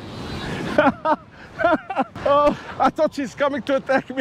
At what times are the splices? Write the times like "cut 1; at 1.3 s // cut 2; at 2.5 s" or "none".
cut 1; at 2.1 s // cut 2; at 2.7 s